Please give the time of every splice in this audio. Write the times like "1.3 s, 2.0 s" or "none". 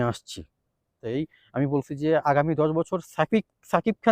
1.0 s